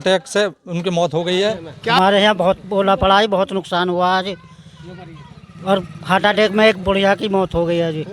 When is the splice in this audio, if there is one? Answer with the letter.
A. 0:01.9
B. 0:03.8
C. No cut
A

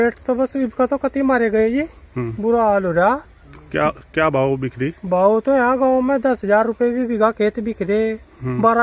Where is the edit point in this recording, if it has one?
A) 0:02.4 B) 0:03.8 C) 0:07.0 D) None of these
D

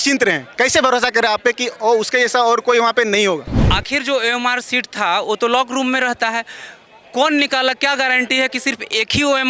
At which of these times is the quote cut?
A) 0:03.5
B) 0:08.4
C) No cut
A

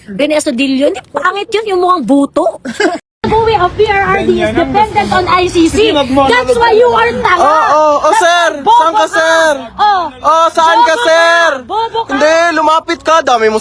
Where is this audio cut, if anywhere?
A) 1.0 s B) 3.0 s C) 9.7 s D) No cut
B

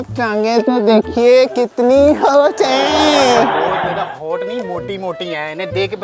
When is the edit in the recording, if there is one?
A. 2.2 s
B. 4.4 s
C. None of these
C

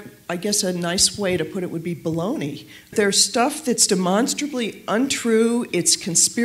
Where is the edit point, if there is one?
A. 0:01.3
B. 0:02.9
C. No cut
B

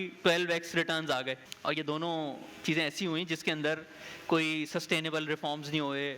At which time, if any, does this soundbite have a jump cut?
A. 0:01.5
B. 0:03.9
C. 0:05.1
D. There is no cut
A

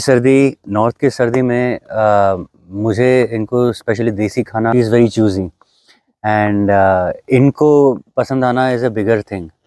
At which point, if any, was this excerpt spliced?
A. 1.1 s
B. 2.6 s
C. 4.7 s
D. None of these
C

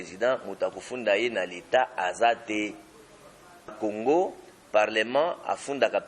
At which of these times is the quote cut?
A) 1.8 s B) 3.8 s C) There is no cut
B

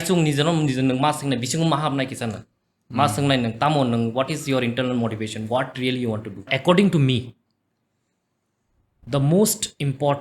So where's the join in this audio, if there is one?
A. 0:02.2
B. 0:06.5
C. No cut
B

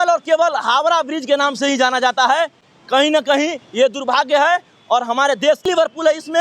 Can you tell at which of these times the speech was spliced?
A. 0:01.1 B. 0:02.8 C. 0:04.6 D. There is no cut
D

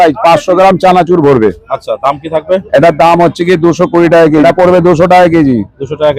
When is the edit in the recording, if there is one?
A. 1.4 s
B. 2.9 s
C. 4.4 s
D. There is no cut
C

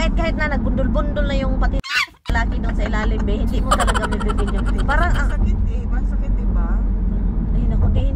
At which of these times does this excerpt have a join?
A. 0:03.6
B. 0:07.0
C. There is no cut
C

